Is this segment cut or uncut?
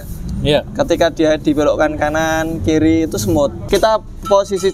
cut